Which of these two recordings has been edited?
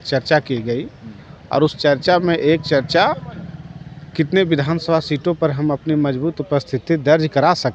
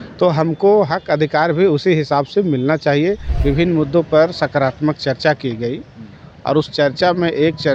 second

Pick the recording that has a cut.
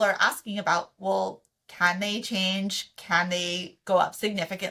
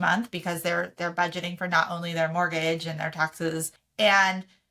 second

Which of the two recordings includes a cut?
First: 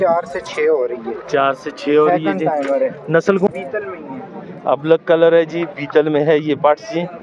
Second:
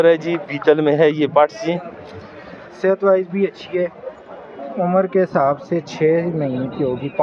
first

